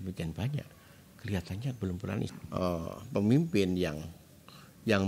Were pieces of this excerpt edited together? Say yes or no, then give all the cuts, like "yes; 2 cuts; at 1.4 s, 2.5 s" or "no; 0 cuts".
yes; 1 cut; at 2.2 s